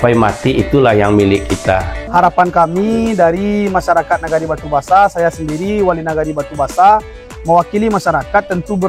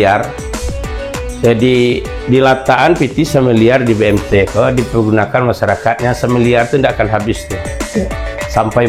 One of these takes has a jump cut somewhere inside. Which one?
first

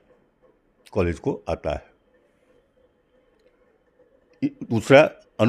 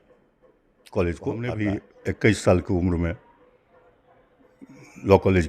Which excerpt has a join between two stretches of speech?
second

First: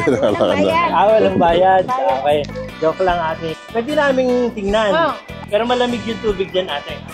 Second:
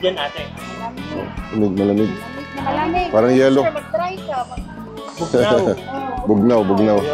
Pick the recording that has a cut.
first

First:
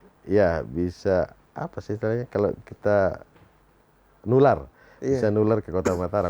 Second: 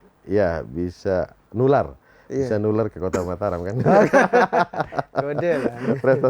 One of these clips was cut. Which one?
second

